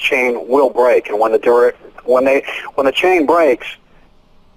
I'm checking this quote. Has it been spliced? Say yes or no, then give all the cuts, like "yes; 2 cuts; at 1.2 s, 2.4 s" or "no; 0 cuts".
no; 0 cuts